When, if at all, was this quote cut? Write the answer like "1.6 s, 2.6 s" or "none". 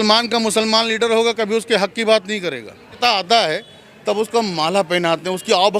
3.0 s